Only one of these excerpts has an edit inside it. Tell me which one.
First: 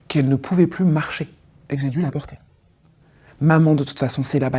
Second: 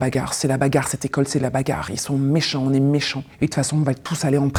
first; 1 cut; at 3.3 s

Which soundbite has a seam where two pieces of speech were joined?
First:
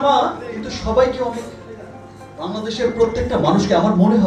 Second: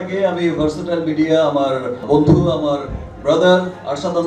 second; 1 cut; at 1.9 s

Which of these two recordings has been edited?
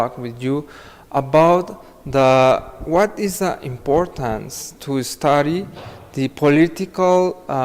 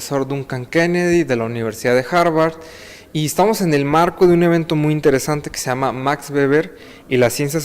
second; 1 cut; at 2.3 s

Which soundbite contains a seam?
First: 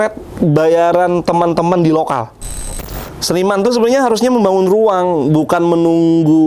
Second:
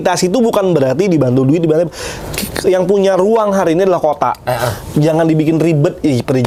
first; 1 cut; at 2.7 s

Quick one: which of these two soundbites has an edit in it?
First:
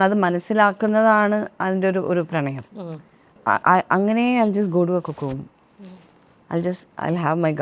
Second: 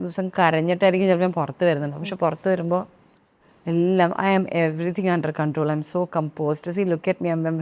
first; 1 cut; at 3.4 s

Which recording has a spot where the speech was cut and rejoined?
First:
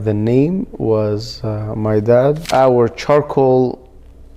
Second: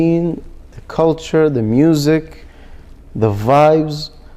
first; 1 cut; at 2.4 s

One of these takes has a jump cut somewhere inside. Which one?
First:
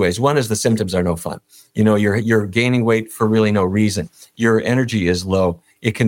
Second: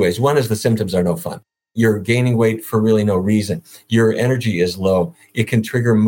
second; 1 cut; at 1.7 s

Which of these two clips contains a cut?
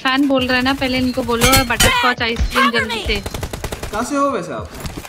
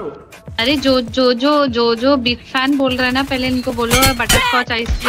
first; 1 cut; at 3.8 s

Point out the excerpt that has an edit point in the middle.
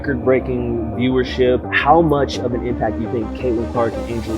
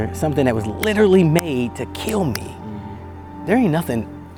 first; 1 cut; at 1.6 s

